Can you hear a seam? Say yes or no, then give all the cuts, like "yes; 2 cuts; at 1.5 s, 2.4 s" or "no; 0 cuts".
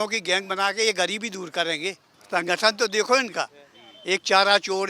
yes; 1 cut; at 2.1 s